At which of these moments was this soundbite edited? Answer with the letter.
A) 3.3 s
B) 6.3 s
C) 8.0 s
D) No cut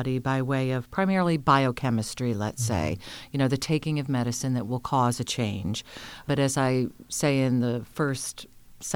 B